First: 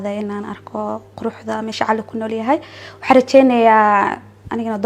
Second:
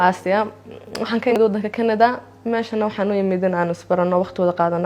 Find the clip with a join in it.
second; 1 cut; at 1.4 s

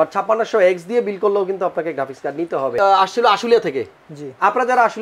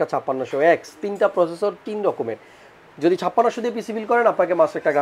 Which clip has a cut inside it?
first; 1 cut; at 2.8 s

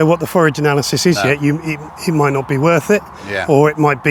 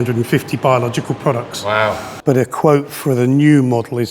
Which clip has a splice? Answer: second; 1 cut; at 2.1 s

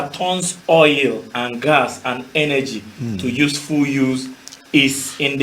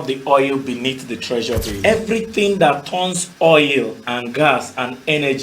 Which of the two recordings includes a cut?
second; 1 cut; at 1.7 s

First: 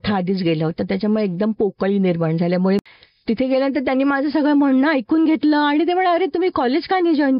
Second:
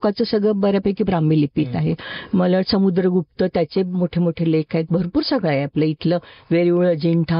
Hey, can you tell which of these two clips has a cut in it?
first; 1 cut; at 2.8 s

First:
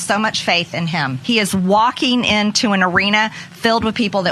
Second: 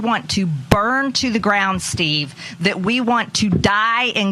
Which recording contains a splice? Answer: first; 1 cut; at 1.2 s

